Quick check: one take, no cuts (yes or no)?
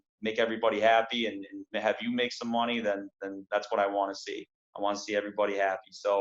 yes